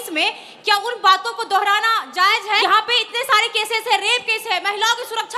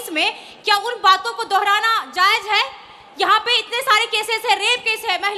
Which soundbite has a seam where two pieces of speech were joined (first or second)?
first